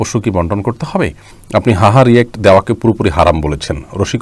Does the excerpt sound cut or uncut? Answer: cut